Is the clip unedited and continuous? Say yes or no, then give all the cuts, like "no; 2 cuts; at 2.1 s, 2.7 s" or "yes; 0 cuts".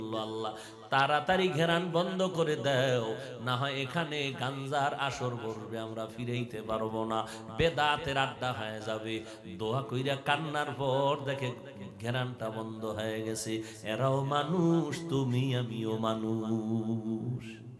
yes; 0 cuts